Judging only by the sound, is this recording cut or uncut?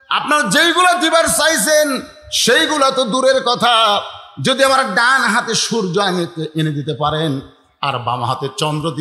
uncut